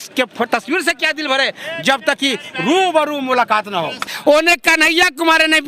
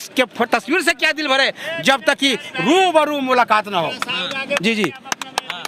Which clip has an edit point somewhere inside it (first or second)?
first